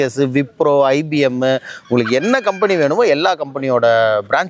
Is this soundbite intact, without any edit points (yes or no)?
yes